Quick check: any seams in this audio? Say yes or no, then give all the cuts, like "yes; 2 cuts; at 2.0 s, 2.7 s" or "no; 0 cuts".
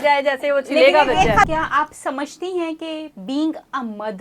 yes; 1 cut; at 1.5 s